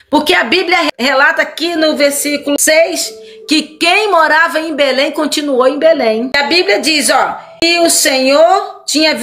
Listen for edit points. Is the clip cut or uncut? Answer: cut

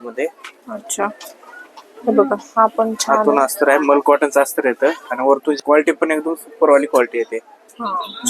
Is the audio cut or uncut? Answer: cut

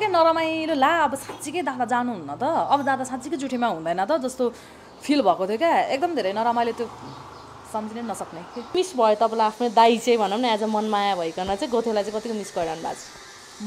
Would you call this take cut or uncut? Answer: cut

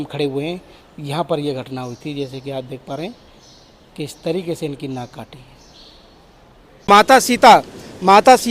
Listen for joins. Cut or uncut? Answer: cut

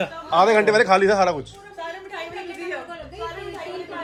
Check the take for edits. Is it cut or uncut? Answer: uncut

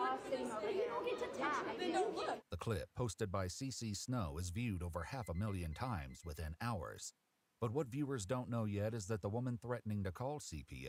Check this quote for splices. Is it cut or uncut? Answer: uncut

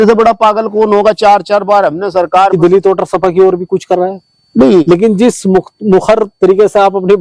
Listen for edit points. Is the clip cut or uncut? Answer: cut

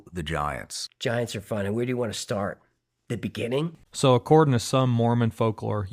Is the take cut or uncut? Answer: cut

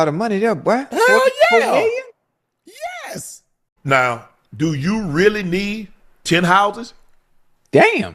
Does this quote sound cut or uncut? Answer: cut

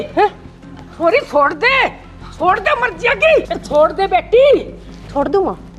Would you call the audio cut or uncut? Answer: uncut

